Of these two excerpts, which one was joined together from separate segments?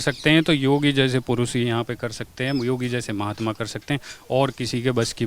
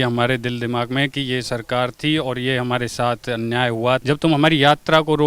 second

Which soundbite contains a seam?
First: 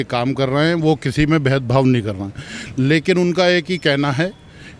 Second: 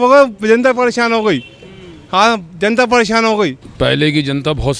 second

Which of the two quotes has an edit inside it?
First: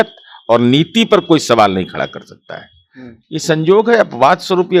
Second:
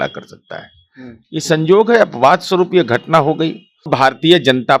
second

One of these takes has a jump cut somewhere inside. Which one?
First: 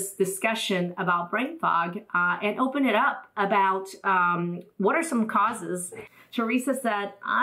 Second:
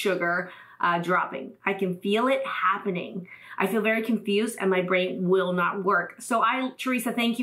first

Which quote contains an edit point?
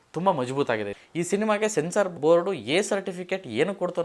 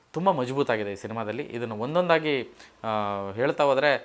first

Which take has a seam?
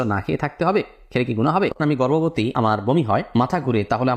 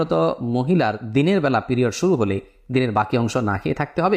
first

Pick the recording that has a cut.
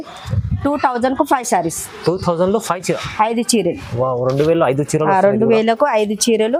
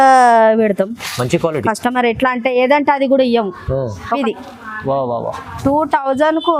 second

